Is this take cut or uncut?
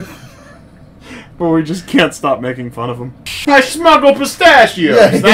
cut